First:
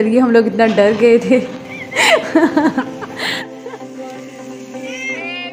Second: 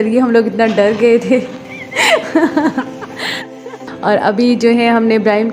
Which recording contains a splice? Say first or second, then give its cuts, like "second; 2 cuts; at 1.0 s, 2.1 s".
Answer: second; 1 cut; at 3.9 s